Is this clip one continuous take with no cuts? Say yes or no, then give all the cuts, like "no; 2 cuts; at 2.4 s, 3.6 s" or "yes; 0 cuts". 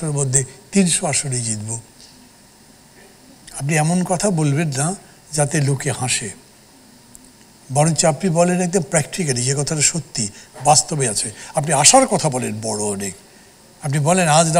yes; 0 cuts